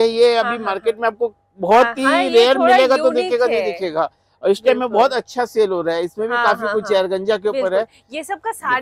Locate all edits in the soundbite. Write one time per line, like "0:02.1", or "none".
none